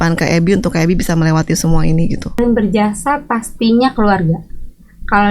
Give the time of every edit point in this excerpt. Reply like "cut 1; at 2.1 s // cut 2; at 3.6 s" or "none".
cut 1; at 2.4 s